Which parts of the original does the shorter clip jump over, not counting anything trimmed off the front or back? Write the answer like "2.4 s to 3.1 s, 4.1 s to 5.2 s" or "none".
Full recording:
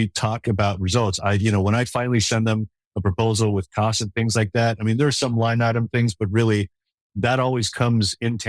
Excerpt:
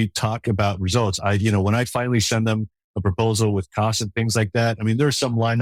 none